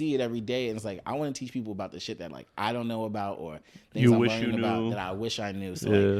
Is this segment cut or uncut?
uncut